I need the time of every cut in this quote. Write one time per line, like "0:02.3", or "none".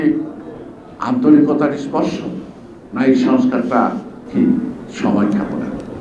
0:04.1

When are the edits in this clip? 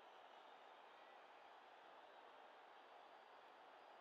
none

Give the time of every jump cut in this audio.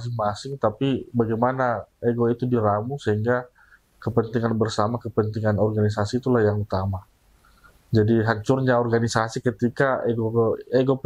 none

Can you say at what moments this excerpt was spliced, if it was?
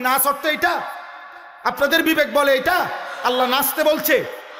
none

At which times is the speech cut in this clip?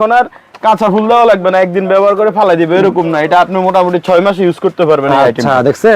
none

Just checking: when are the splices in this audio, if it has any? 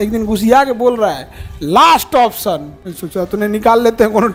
none

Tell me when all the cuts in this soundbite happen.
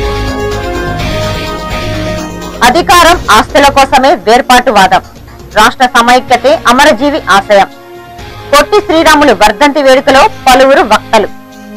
0:02.0

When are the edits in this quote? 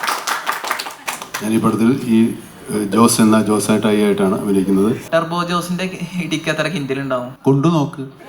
0:05.0
0:07.3

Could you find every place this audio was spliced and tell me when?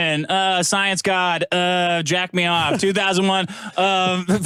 none

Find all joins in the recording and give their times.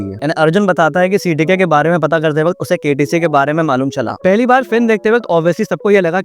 0:04.1

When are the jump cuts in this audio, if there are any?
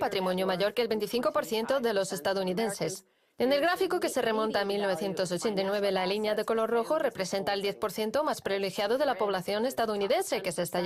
0:03.6

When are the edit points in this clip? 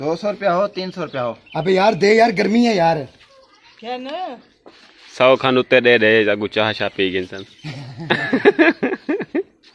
none

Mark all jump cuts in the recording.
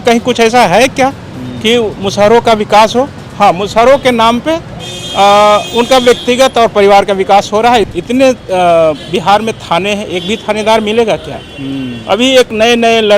0:07.9

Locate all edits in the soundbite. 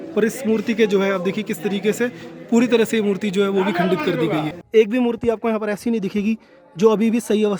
0:04.5

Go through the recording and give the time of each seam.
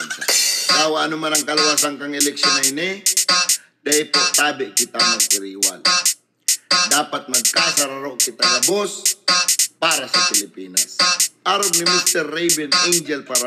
none

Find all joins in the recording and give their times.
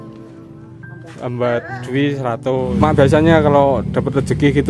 0:02.7

